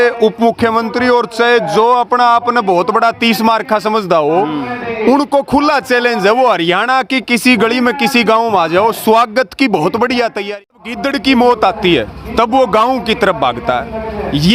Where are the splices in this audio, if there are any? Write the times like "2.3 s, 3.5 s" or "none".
10.7 s